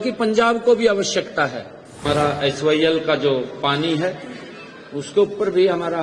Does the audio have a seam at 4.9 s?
no; 1 cut; at 2.0 s

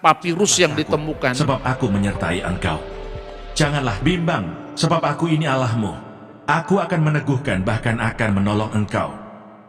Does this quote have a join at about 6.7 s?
no; 1 cut; at 1.3 s

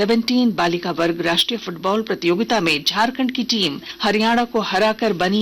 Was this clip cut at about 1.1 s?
no; 1 cut; at 3.9 s

